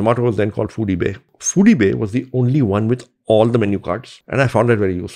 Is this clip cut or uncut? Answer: cut